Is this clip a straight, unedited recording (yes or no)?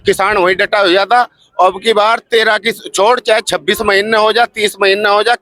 yes